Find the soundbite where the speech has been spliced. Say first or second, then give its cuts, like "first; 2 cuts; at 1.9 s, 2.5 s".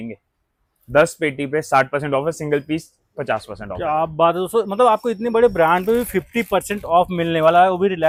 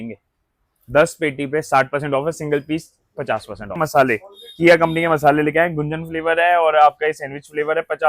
second; 1 cut; at 3.8 s